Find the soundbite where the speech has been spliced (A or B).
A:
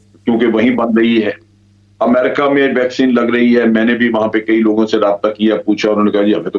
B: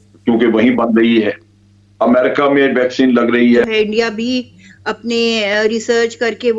B